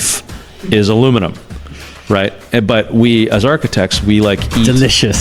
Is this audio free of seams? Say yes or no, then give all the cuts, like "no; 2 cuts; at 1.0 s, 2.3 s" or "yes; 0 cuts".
yes; 0 cuts